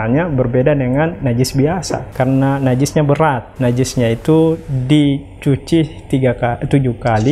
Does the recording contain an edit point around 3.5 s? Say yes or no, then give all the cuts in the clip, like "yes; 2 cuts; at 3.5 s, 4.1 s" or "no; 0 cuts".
yes; 2 cuts; at 2.0 s, 3.5 s